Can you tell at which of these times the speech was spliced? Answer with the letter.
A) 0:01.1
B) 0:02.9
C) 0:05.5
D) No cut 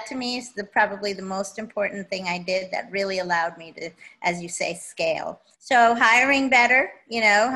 C